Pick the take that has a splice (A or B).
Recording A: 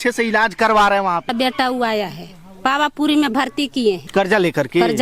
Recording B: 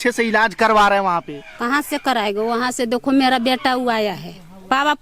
A